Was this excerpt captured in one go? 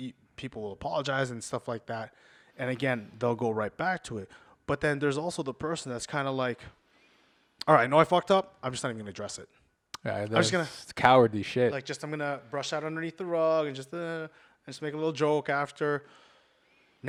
yes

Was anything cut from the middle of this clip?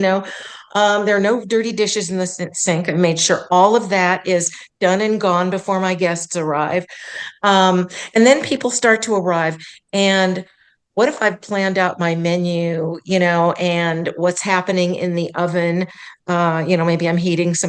no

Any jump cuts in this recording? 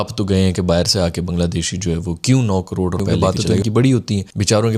yes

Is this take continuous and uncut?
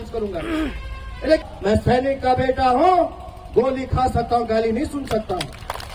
no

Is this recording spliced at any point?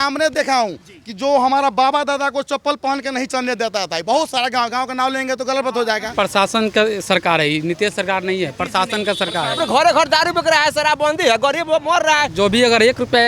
yes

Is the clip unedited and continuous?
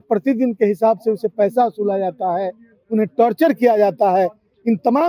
yes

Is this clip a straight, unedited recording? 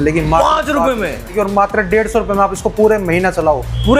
no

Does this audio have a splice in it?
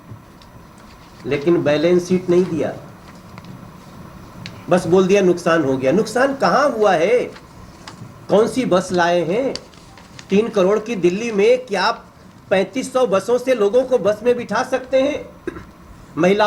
no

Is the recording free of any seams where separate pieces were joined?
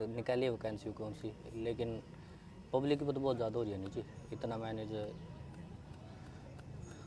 yes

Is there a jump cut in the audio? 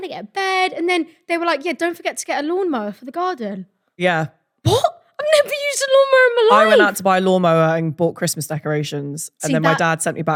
no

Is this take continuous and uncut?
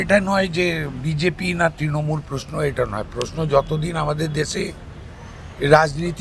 yes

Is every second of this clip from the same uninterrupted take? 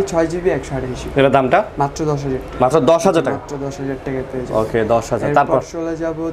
yes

